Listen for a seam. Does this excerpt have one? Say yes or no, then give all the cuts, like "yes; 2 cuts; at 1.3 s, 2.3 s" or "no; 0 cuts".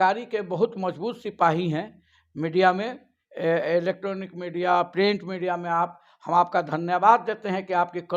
no; 0 cuts